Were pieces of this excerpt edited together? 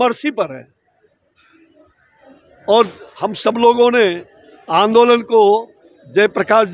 no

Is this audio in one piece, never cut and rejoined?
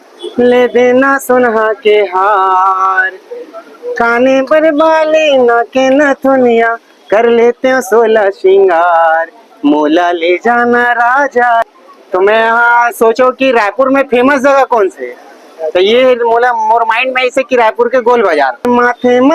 no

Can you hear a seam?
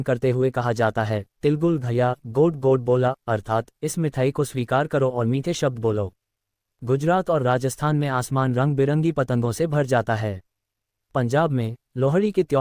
no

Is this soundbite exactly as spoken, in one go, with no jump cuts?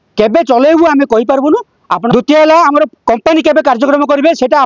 no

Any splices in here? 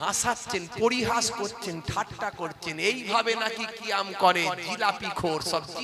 no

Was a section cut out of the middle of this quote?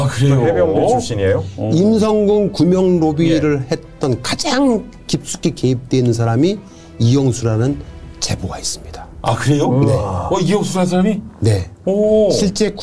no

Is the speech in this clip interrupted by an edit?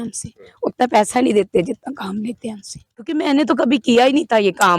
yes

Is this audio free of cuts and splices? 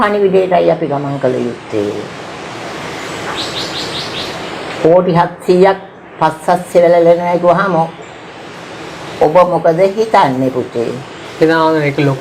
yes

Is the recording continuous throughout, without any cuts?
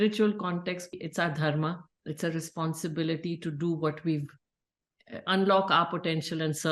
no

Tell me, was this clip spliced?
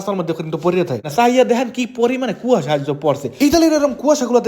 yes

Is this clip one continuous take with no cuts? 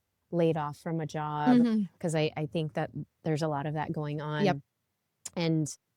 yes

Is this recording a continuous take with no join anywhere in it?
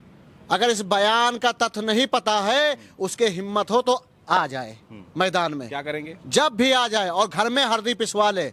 yes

